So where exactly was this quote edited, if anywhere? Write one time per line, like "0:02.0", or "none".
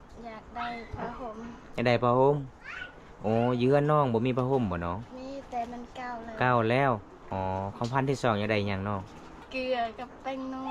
0:07.2
0:09.3

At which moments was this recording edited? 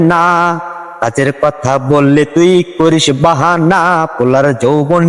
none

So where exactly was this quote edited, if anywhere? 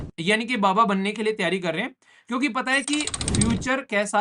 none

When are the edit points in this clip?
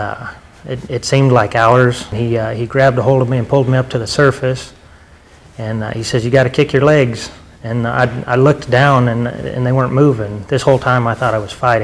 0:02.1

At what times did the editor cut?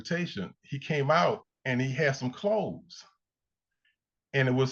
0:01.5

